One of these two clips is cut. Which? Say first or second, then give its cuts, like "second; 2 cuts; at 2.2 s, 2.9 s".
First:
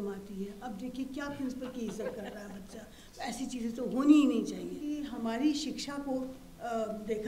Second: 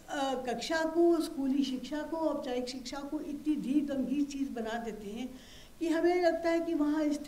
first; 1 cut; at 4.8 s